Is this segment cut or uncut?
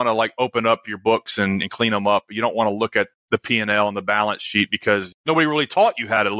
cut